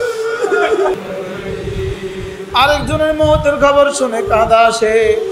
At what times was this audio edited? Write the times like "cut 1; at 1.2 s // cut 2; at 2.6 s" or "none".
cut 1; at 0.9 s